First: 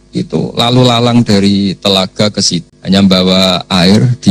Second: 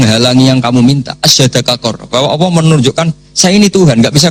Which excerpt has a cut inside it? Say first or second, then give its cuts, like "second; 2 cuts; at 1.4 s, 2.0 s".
first; 1 cut; at 2.7 s